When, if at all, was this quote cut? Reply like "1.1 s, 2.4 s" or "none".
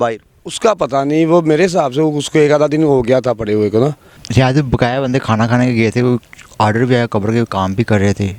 4.2 s